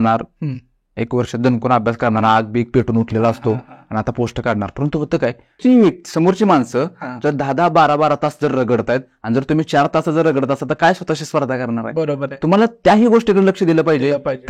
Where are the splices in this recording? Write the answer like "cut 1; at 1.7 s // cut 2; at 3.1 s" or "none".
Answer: cut 1; at 5.6 s

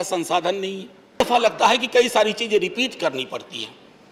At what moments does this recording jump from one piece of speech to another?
cut 1; at 1.2 s

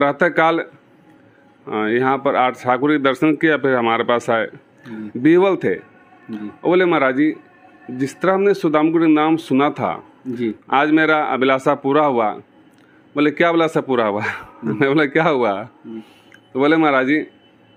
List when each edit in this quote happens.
cut 1; at 10.6 s

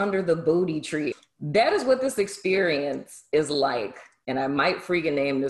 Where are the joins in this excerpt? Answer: cut 1; at 1.1 s

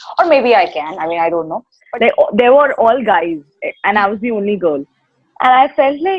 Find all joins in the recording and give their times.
cut 1; at 1.7 s

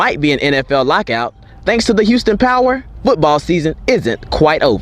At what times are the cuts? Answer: none

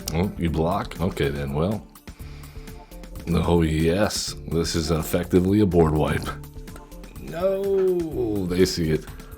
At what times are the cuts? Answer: cut 1; at 0.9 s // cut 2; at 3.1 s

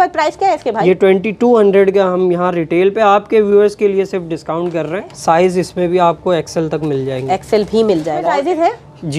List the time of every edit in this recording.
cut 1; at 5.1 s // cut 2; at 8.3 s

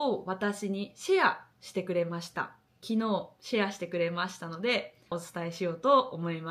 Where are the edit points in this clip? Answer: cut 1; at 5.2 s

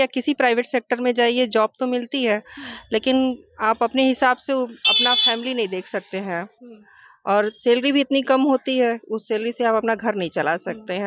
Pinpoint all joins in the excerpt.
none

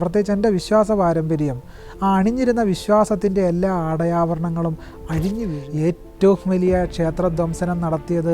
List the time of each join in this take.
cut 1; at 5.6 s

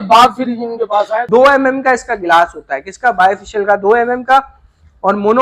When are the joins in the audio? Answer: cut 1; at 1.2 s

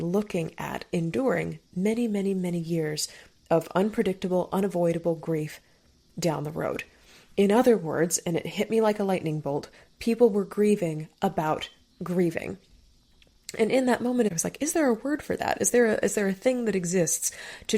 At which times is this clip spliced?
cut 1; at 14.3 s

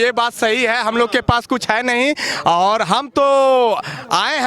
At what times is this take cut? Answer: none

